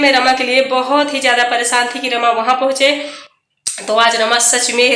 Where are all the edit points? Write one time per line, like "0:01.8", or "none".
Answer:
none